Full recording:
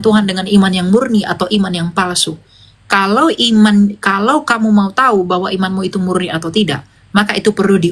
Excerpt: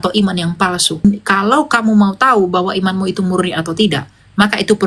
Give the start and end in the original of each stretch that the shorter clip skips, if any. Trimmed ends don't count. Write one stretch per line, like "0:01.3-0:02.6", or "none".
0:02.4-0:03.8